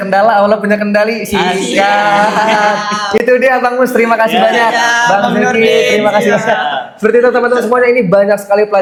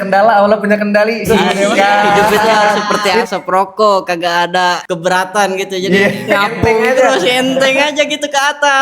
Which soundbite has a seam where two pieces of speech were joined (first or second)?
second